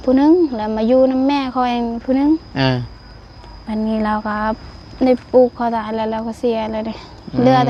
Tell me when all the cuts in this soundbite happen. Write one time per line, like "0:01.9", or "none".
none